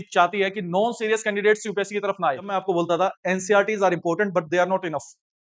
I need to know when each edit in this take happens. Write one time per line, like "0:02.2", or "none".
0:02.5

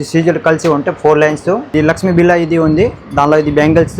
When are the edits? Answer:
0:01.7

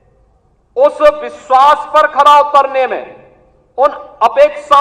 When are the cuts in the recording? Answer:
none

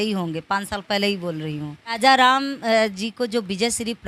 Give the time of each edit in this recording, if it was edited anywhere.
0:02.0

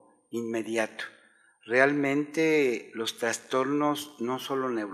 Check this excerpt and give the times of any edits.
none

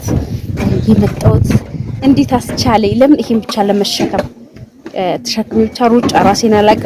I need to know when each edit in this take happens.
none

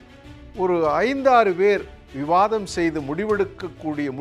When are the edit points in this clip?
none

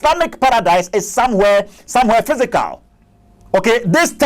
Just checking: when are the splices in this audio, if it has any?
none

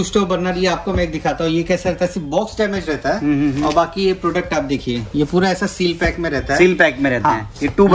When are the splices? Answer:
none

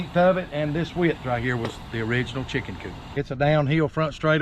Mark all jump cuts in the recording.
0:02.9

